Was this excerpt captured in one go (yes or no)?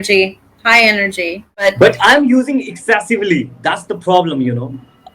no